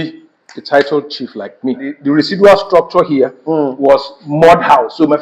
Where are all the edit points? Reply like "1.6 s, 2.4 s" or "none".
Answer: 1.9 s